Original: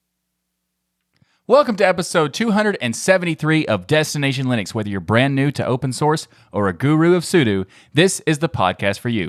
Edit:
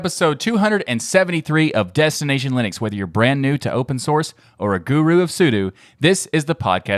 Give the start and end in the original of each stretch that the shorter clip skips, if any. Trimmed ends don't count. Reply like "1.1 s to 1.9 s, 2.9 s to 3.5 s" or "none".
none